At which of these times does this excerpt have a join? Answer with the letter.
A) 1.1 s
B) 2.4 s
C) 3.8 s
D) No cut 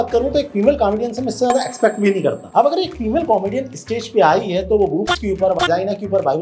D